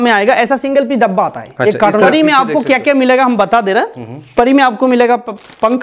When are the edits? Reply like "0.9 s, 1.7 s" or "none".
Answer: 2.1 s